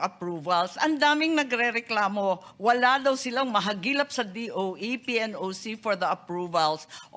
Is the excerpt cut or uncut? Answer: uncut